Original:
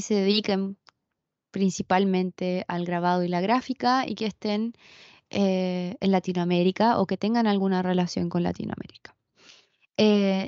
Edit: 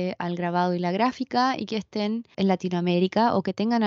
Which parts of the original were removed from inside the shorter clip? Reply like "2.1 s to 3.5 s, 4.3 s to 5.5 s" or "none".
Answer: 4.8 s to 5.9 s